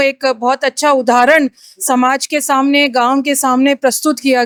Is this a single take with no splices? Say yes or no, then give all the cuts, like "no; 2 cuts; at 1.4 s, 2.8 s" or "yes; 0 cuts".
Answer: yes; 0 cuts